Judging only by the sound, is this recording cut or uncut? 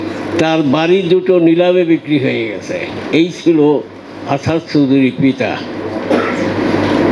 uncut